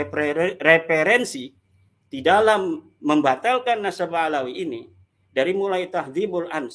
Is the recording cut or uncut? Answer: uncut